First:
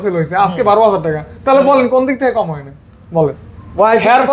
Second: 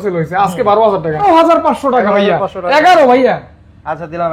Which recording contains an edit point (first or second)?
second